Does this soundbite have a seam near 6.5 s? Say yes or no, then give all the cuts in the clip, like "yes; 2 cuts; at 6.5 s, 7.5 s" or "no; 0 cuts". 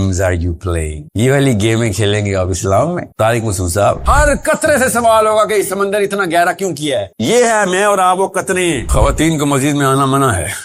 no; 2 cuts; at 4.0 s, 8.8 s